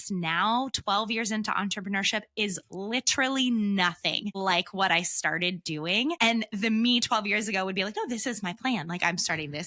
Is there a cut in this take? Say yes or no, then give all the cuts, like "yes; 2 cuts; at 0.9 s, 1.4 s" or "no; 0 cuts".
yes; 2 cuts; at 4.3 s, 6.2 s